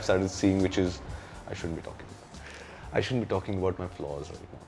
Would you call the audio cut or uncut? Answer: uncut